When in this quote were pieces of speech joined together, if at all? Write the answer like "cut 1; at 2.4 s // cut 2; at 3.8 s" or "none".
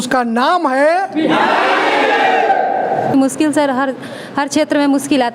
cut 1; at 3.1 s